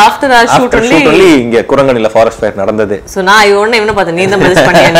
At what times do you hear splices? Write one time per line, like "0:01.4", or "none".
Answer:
none